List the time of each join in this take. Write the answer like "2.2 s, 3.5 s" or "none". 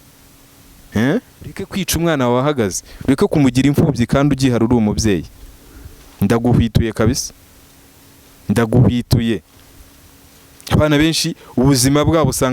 1.8 s